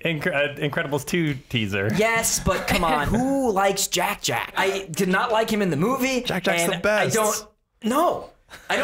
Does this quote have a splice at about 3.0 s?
yes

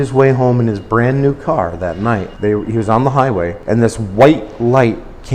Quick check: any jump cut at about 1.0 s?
no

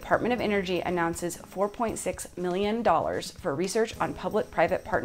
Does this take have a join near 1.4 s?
no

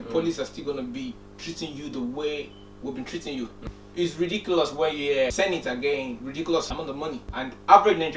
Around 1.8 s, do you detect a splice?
no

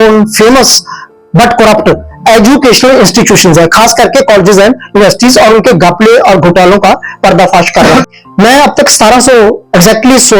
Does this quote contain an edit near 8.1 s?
yes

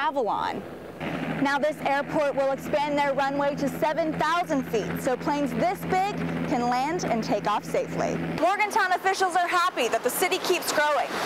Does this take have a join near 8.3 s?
yes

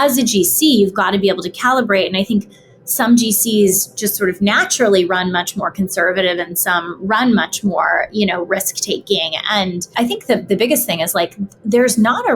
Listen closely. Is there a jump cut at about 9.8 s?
yes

